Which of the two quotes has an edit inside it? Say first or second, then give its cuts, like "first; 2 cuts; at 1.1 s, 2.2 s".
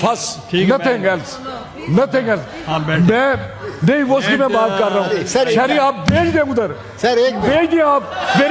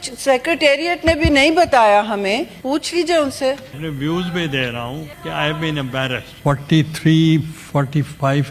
second; 4 cuts; at 2.5 s, 3.8 s, 5.1 s, 6.3 s